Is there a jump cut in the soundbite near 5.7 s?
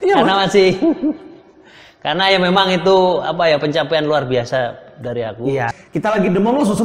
yes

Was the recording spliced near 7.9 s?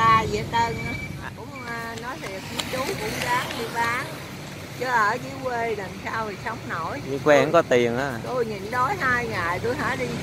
no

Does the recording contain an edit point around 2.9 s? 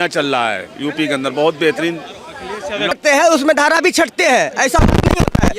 yes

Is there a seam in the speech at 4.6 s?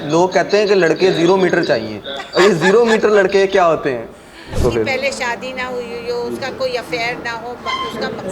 yes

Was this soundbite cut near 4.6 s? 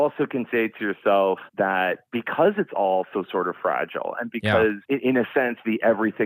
no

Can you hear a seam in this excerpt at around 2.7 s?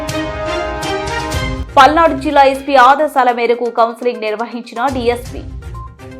no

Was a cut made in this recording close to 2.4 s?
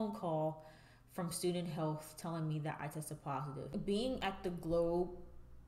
no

